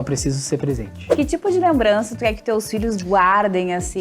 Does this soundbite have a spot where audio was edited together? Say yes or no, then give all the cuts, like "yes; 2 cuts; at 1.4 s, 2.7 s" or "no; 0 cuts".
yes; 1 cut; at 1.1 s